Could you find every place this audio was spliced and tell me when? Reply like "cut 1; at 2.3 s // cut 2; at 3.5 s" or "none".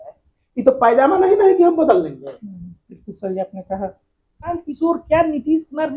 cut 1; at 4.5 s